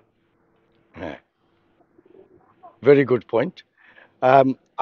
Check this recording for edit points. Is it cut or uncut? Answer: uncut